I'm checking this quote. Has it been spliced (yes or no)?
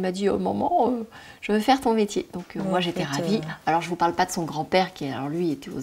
no